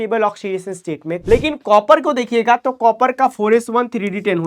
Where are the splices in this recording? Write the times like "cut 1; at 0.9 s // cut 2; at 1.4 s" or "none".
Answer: cut 1; at 1.2 s